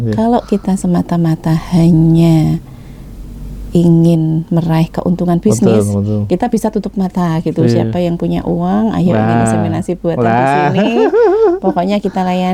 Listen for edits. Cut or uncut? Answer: uncut